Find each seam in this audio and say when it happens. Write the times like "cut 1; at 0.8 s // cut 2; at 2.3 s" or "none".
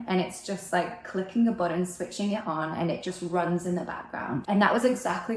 cut 1; at 4.4 s